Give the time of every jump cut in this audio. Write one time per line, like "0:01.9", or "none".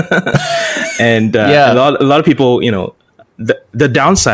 none